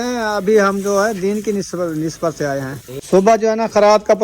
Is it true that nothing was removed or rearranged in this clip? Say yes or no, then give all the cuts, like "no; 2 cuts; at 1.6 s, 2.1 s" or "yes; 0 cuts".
no; 1 cut; at 2.8 s